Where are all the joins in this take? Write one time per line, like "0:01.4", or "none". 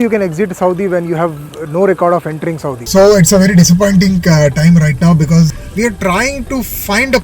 0:02.8
0:05.6